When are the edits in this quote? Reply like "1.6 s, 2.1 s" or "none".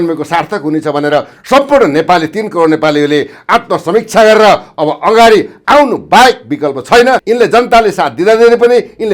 7.2 s

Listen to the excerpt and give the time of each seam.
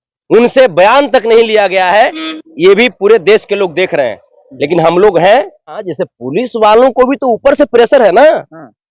5.9 s

